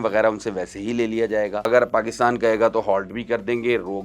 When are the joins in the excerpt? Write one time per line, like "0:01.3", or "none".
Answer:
0:01.6